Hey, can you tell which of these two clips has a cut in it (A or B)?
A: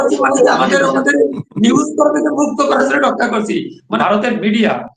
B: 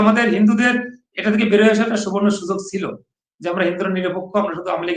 A